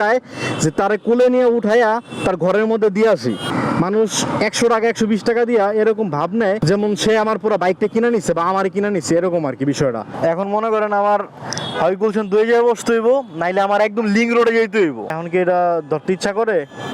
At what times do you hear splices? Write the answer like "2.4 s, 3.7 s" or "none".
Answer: 3.4 s, 6.6 s, 10.1 s, 15.2 s